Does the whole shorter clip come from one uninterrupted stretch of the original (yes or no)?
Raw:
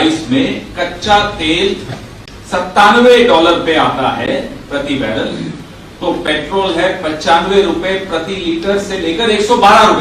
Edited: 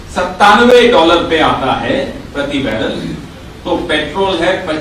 yes